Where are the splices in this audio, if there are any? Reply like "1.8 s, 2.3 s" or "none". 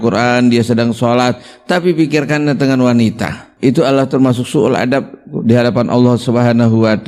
3.5 s